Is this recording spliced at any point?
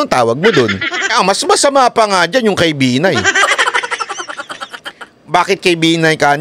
yes; 1 cut; at 1.0 s

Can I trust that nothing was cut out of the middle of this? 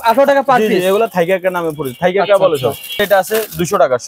no; 1 cut; at 3.0 s

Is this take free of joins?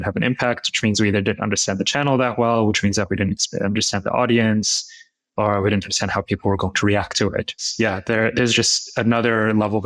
no; 1 cut; at 7.6 s

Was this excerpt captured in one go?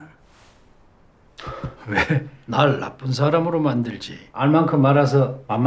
no; 1 cut; at 4.3 s

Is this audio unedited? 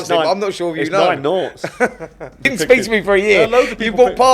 no; 1 cut; at 2.5 s

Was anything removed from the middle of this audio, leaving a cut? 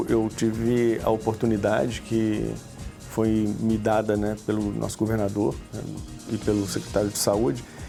no; 0 cuts

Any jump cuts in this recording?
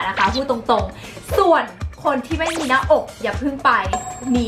no; 0 cuts

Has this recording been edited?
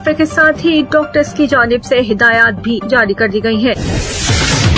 yes; 1 cut; at 3.8 s

